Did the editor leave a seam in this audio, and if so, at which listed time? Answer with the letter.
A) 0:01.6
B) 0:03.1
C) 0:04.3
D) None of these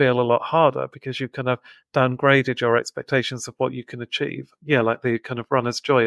D